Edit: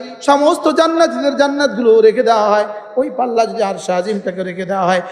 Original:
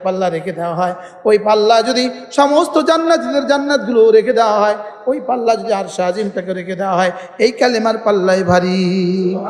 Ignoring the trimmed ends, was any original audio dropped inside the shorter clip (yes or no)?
no